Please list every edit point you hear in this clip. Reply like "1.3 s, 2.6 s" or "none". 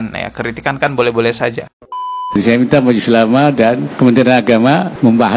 2.0 s